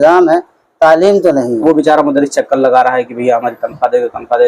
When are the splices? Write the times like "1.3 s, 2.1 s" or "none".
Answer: 1.6 s